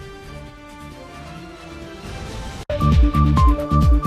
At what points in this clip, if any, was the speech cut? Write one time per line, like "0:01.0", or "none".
0:02.6